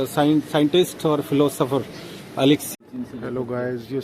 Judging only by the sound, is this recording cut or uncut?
cut